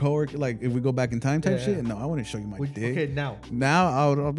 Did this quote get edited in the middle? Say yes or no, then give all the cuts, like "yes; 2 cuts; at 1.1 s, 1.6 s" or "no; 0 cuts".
no; 0 cuts